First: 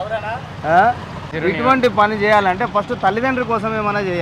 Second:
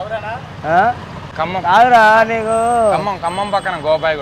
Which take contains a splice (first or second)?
first